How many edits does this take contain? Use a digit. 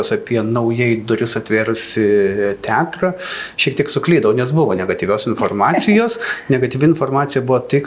0